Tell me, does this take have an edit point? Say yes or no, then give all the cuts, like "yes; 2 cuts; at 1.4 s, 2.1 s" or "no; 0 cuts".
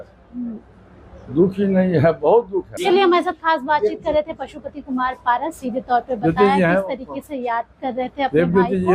no; 0 cuts